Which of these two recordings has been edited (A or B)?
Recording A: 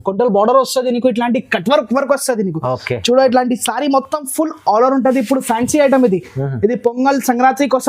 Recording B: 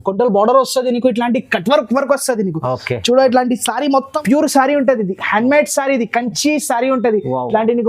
B